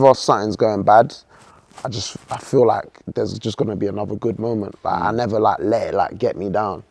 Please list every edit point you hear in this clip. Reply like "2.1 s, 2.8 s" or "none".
none